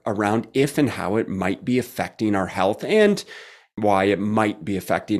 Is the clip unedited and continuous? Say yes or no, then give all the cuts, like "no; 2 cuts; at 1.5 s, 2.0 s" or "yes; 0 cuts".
yes; 0 cuts